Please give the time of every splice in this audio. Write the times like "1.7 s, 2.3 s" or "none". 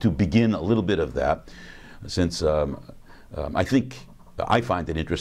1.3 s